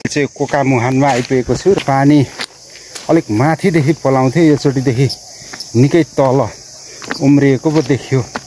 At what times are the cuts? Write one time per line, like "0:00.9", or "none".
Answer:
0:01.8